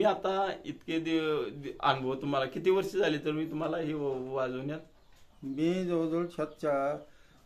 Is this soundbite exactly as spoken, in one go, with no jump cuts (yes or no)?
yes